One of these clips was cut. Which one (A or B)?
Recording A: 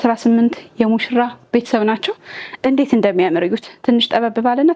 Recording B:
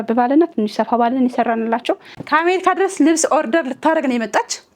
B